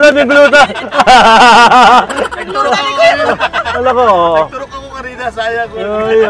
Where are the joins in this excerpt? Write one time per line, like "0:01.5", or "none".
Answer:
none